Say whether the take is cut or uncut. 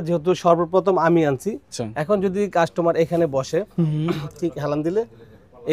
cut